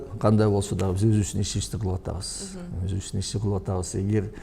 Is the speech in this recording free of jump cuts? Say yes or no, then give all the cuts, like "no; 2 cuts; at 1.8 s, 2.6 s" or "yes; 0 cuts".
yes; 0 cuts